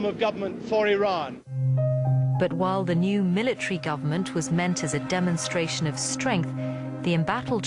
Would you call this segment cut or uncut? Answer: cut